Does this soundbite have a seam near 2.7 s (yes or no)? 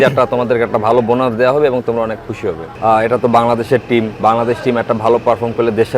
yes